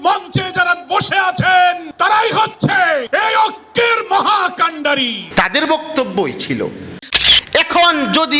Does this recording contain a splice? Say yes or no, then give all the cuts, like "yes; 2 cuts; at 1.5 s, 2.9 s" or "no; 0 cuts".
yes; 1 cut; at 7.0 s